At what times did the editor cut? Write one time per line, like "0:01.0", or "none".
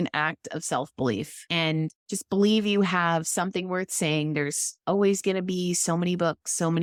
none